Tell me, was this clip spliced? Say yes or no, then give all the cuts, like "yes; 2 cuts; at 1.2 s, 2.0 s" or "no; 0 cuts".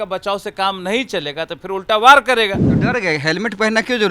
yes; 1 cut; at 2.7 s